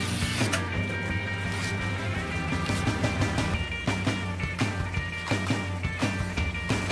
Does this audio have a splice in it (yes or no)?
yes